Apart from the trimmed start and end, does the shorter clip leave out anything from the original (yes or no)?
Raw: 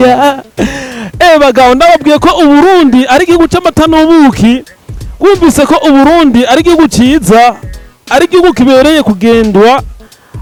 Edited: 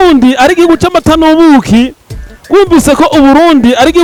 no